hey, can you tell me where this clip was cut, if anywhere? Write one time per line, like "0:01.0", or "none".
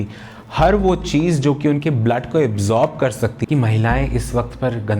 0:03.4